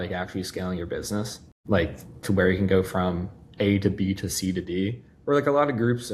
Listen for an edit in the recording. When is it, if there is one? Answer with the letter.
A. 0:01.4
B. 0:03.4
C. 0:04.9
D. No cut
D